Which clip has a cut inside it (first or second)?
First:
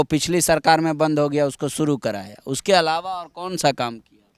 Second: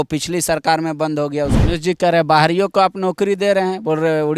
second